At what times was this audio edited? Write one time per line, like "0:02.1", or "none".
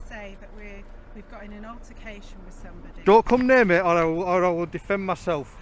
0:03.0